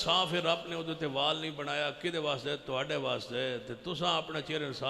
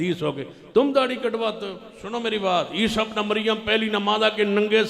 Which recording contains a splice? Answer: second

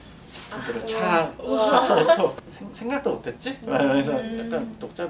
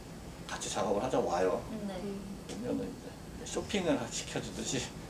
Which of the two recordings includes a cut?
first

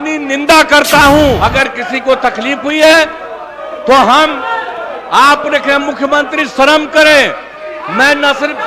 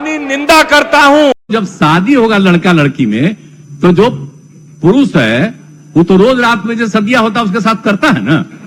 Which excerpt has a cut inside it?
first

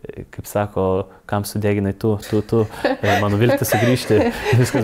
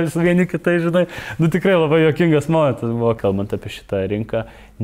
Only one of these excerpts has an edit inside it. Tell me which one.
second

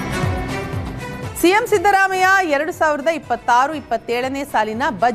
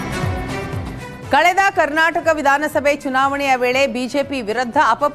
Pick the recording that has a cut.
second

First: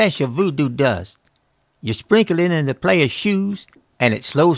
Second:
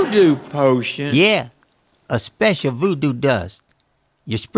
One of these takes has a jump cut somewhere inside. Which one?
second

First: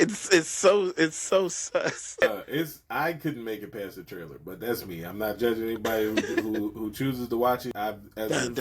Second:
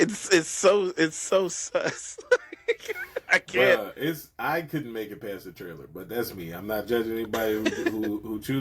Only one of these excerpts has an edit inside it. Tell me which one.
first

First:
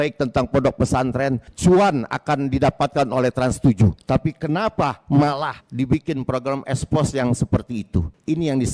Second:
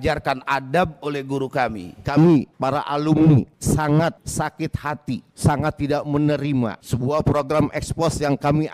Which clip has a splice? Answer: second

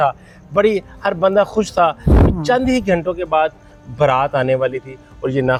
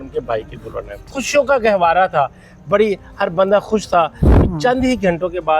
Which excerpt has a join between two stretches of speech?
second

